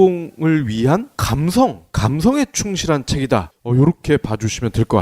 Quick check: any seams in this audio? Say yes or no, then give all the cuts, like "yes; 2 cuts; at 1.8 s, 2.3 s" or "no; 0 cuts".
yes; 1 cut; at 3.5 s